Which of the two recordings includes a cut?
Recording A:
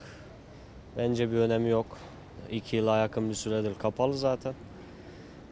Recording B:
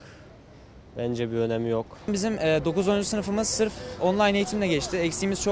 B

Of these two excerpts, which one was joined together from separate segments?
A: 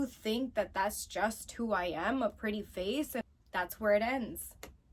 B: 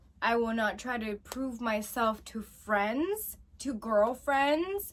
A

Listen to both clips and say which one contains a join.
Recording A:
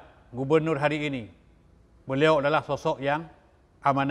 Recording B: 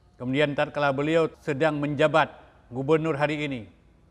B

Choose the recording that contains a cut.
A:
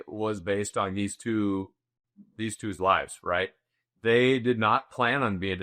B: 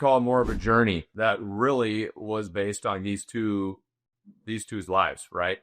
B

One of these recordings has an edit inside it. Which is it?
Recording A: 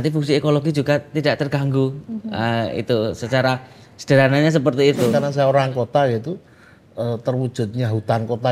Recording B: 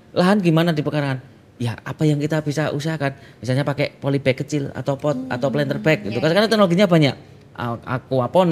A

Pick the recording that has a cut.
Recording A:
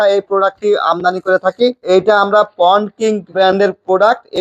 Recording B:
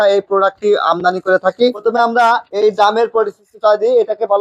B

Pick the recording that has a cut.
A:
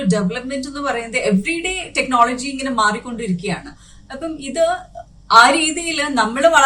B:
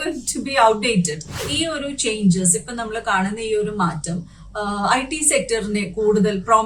B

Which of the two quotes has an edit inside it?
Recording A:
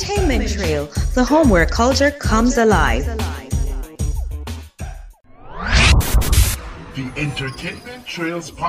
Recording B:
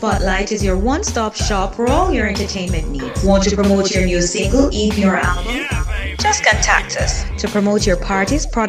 A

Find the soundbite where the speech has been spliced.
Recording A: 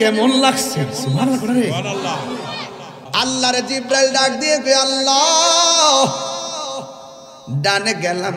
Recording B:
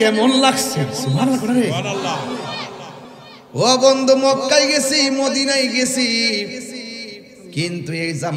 A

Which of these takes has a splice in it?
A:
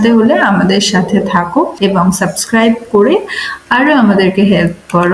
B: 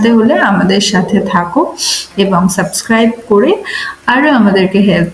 A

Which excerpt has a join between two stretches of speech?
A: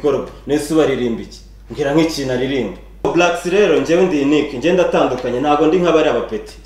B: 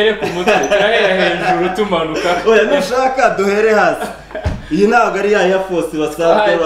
A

